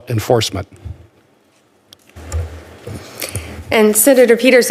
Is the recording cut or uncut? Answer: uncut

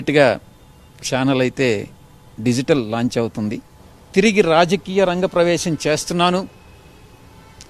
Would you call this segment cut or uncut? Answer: uncut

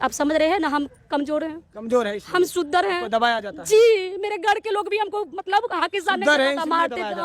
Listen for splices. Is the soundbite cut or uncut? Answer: uncut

